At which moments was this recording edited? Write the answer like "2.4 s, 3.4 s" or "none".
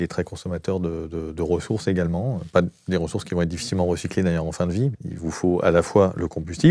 5.0 s